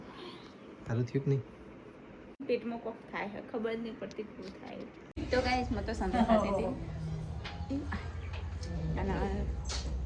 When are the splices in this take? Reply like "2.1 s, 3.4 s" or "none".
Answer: 2.4 s, 5.0 s

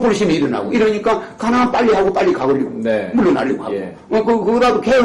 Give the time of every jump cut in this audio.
3.0 s

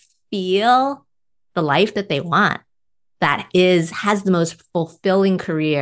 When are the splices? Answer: none

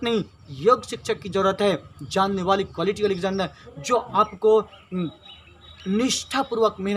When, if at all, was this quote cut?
none

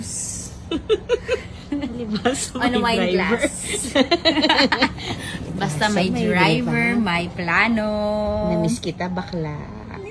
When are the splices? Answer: none

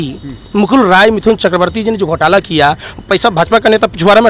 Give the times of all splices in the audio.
none

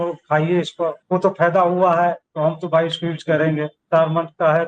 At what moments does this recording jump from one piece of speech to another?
1.0 s, 2.3 s, 3.8 s

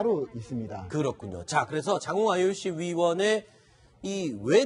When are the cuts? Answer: none

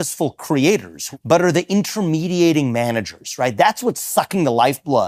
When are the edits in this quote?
1.0 s

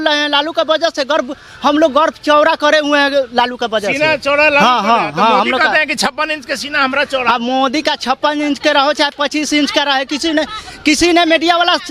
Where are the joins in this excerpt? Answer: none

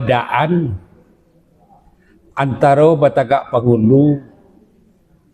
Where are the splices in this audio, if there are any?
none

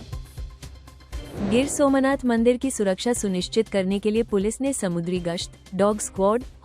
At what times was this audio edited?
none

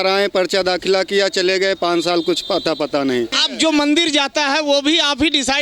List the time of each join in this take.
3.4 s

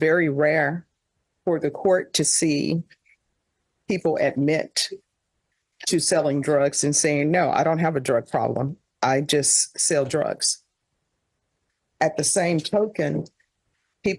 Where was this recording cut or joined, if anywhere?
none

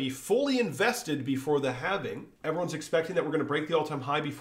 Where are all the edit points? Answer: 2.3 s

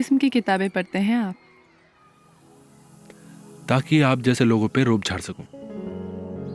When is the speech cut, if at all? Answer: none

